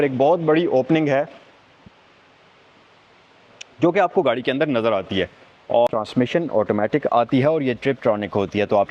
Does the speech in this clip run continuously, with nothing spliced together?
no; 1 cut; at 5.9 s

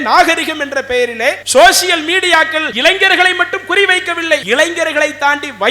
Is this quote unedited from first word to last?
no; 3 cuts; at 1.4 s, 2.7 s, 4.4 s

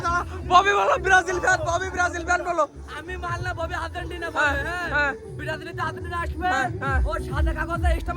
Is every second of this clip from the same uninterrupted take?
yes; 0 cuts

